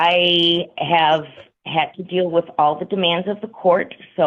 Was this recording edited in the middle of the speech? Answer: no; 0 cuts

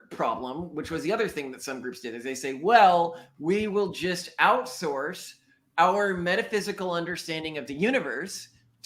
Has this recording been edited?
no; 0 cuts

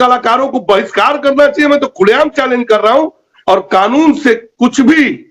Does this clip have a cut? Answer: yes; 1 cut; at 3.3 s

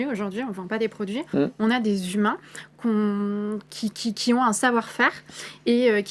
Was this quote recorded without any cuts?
yes; 0 cuts

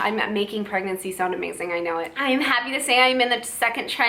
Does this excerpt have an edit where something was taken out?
yes; 1 cut; at 2.2 s

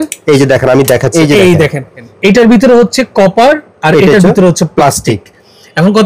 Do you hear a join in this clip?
yes; 2 cuts; at 1.1 s, 2.1 s

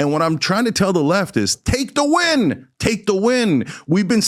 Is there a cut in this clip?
no; 0 cuts

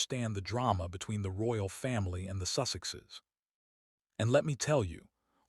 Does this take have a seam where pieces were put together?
yes; 1 cut; at 4.6 s

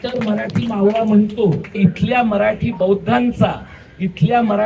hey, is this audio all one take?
no; 1 cut; at 1.8 s

